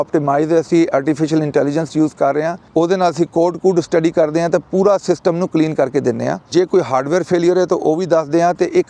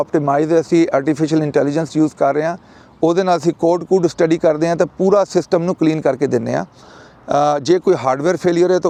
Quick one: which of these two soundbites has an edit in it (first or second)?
first